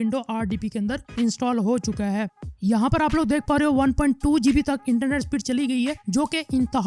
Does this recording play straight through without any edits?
no; 1 cut; at 2.4 s

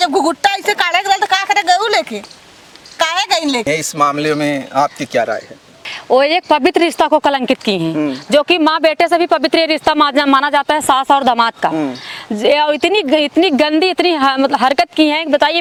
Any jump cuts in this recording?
no; 0 cuts

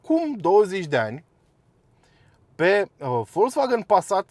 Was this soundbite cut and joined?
no; 0 cuts

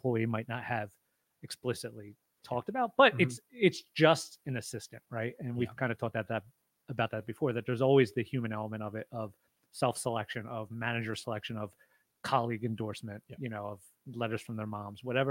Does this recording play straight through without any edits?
yes; 0 cuts

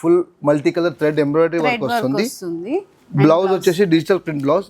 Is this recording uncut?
yes; 0 cuts

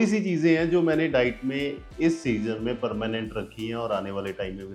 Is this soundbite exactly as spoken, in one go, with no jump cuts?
yes; 0 cuts

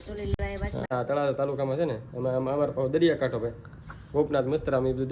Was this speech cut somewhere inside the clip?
yes; 1 cut; at 0.9 s

